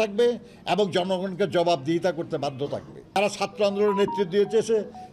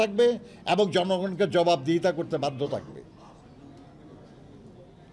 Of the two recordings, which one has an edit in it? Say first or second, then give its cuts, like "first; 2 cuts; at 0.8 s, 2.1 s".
first; 1 cut; at 3.2 s